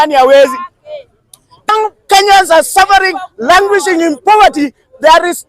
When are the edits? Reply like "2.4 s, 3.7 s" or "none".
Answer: 1.7 s